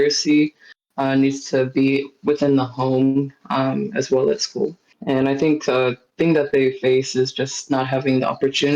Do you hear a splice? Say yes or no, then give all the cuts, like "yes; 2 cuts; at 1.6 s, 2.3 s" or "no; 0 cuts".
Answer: yes; 1 cut; at 4.9 s